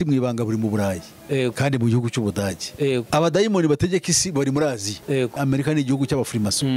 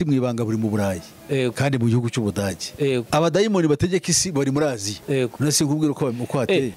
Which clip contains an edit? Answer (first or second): first